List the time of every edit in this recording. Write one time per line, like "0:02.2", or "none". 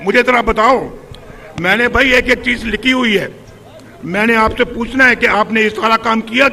none

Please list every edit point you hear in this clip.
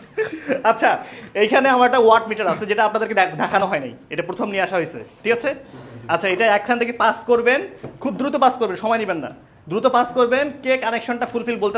none

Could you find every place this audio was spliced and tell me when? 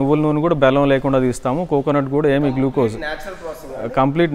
none

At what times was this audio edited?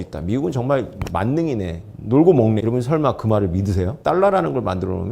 0:02.6
0:03.9

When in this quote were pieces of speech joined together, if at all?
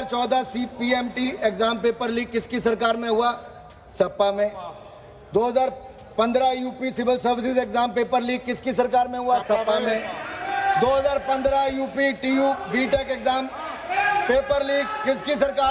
none

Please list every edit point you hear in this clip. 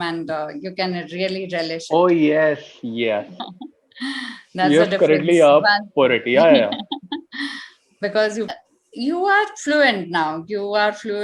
0:08.5

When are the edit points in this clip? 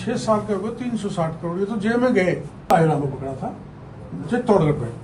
0:02.7

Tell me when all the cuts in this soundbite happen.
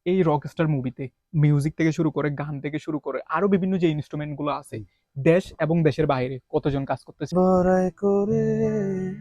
0:07.3

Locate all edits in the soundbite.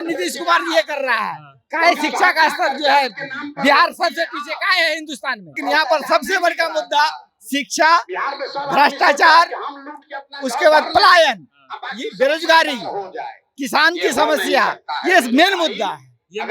0:05.6

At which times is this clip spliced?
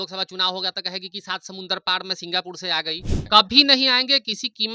0:03.2

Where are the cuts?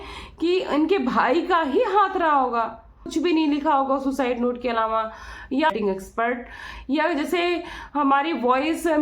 0:03.0
0:05.7

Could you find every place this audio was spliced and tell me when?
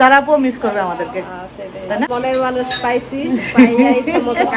0:02.1

